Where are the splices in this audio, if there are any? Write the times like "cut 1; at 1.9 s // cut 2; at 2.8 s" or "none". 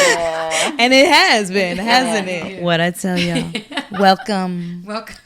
cut 1; at 2.5 s